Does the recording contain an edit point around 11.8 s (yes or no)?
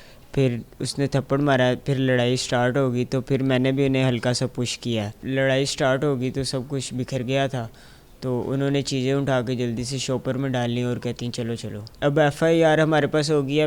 yes